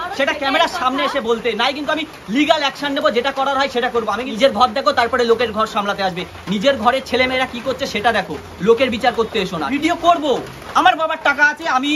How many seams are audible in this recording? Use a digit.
2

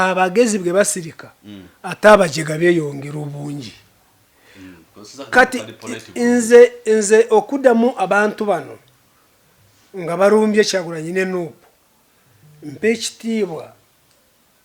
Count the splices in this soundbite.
0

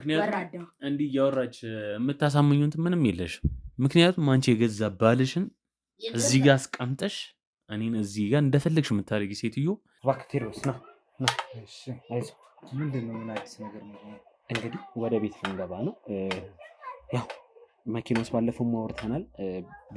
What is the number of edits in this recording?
1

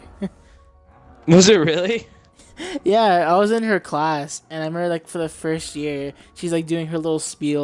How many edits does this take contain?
1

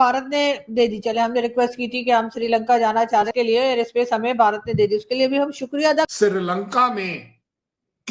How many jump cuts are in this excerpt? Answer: 2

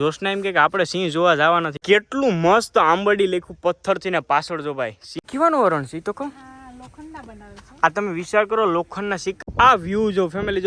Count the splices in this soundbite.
3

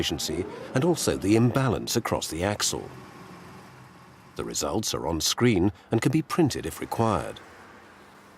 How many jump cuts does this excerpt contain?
1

